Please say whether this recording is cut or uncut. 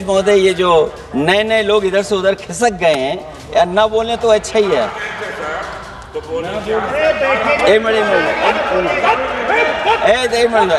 uncut